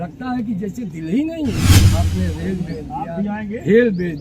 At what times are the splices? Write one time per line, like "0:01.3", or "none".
0:01.8